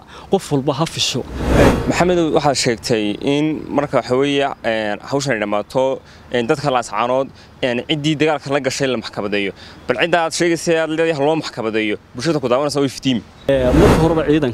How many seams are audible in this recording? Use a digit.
2